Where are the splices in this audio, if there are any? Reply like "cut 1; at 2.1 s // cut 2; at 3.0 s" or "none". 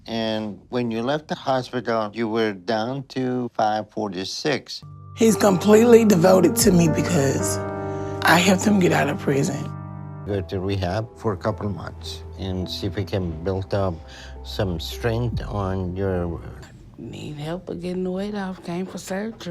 cut 1; at 4.9 s // cut 2; at 10.1 s // cut 3; at 16.5 s